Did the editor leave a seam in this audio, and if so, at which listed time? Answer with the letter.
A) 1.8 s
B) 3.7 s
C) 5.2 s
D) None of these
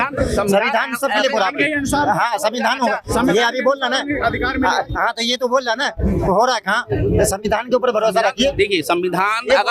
D